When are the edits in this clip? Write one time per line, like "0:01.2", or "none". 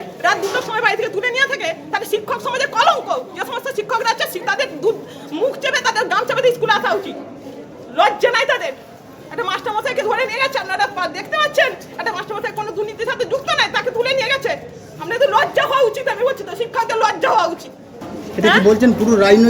0:17.9